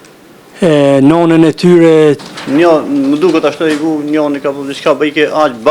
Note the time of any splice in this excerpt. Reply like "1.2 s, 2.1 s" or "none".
2.2 s